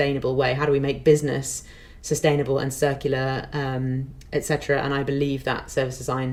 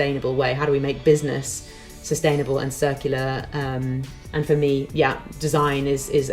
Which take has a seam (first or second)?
second